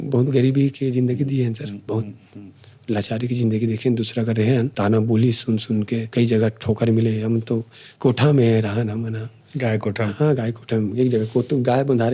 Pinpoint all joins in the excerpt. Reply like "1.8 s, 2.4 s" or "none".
4.7 s, 6.1 s, 7.8 s